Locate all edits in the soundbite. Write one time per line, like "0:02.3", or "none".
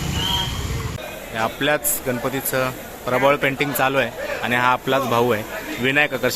0:01.0